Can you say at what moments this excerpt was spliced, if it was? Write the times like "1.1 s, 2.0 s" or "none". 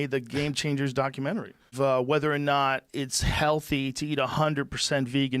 1.7 s

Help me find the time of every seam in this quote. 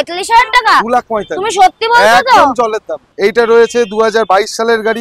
3.1 s

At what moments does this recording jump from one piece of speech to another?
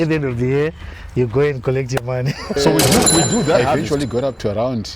3.7 s

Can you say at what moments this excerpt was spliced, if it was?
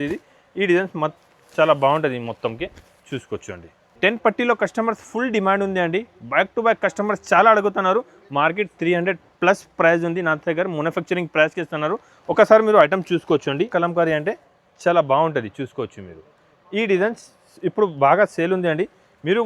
3.8 s, 13.7 s

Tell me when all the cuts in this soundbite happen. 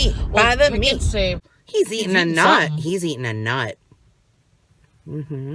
1.4 s

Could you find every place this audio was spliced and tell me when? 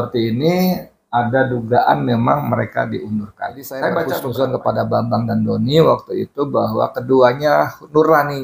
4.3 s

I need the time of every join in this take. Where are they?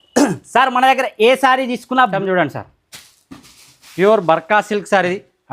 2.1 s

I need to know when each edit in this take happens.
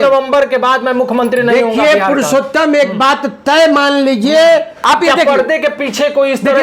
4.7 s

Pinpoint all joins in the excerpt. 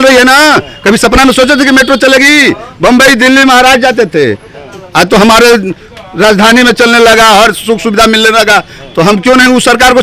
none

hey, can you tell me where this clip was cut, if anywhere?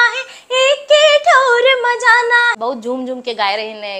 2.6 s

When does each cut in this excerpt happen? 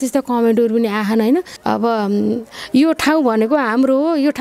1.5 s

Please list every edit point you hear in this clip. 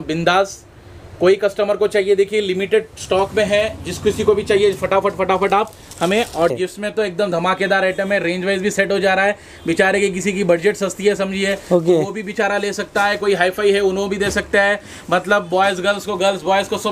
6.5 s

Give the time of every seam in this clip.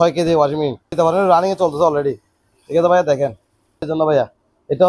0.9 s, 3.8 s

